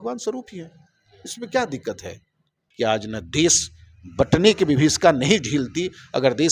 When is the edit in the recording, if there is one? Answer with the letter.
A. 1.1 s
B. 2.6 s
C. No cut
B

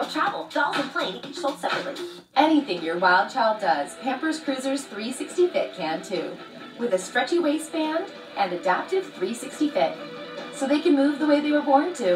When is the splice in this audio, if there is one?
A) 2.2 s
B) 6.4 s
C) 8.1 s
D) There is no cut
A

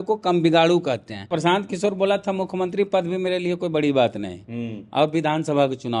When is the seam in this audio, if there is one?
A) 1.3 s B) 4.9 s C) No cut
A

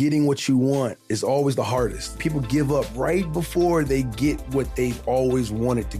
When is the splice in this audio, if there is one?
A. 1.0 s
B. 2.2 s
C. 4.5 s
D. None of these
B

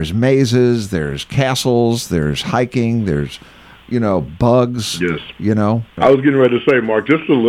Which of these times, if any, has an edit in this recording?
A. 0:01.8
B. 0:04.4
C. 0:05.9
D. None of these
C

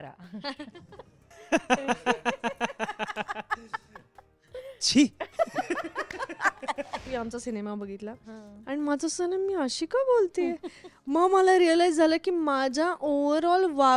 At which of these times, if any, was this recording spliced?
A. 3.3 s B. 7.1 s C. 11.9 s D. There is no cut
B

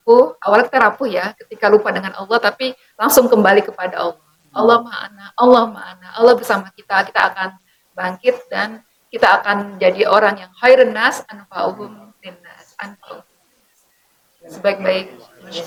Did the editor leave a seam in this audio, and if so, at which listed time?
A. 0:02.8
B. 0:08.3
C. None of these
C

